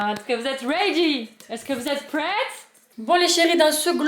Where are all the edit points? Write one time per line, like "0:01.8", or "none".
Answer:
0:02.9